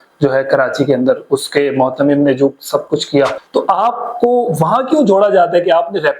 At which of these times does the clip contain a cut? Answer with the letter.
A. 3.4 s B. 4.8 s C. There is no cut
A